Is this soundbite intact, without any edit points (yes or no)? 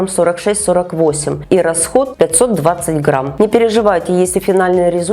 no